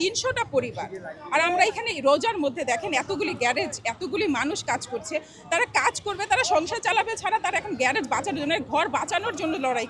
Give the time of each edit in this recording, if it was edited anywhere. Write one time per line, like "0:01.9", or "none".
none